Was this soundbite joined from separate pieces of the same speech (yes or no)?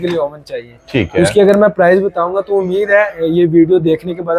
no